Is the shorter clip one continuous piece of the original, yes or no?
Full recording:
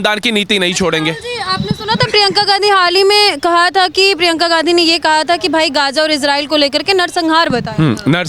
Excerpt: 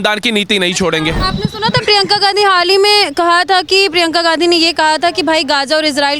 no